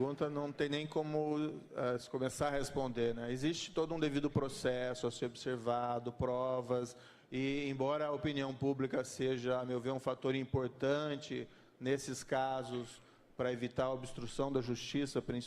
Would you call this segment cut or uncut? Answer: cut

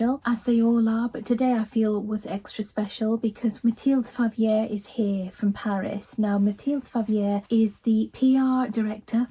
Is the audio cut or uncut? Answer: cut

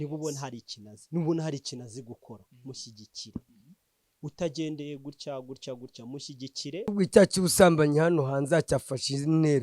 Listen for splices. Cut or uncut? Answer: cut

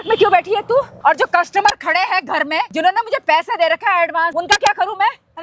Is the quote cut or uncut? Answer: cut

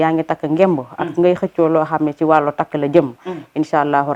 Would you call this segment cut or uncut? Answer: uncut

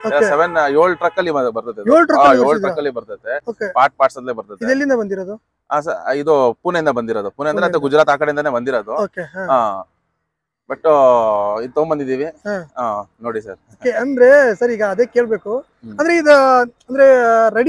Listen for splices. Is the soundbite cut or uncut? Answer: uncut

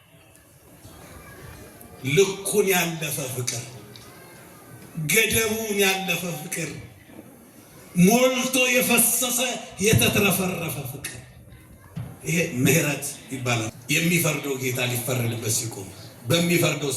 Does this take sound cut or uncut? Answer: cut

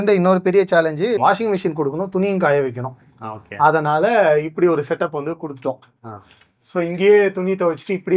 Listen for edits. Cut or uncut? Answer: cut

